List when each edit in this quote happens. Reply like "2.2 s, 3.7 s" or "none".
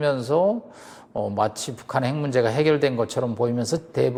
none